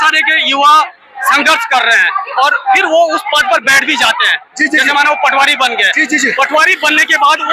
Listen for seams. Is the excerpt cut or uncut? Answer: uncut